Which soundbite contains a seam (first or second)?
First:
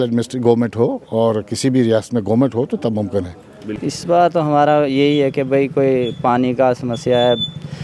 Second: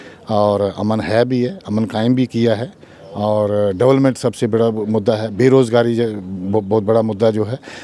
first